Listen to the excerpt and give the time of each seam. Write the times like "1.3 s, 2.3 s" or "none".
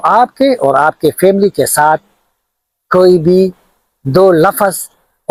none